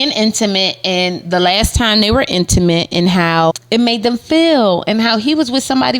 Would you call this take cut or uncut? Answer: cut